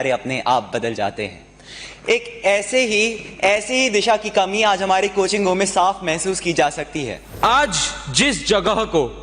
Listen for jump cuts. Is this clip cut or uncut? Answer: cut